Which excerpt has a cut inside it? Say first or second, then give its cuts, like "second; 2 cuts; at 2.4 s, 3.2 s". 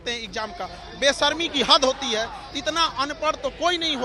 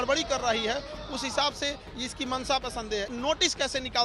second; 1 cut; at 3.1 s